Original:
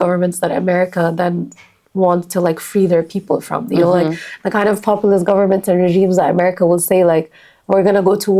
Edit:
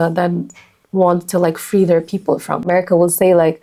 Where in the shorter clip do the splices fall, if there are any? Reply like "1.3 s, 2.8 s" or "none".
2.7 s